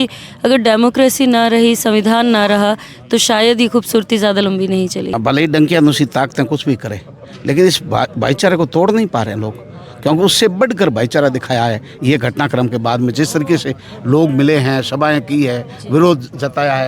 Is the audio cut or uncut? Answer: cut